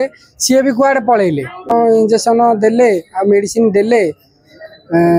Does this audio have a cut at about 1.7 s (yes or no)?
yes